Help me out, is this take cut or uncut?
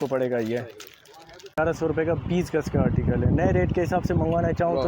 cut